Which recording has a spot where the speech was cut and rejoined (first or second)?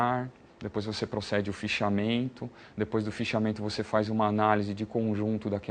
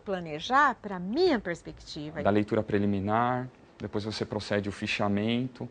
second